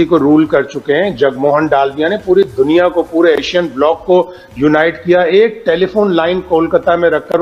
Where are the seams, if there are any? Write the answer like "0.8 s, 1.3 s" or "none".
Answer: none